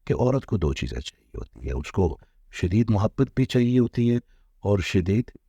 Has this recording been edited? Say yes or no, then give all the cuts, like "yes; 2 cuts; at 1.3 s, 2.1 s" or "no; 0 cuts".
no; 0 cuts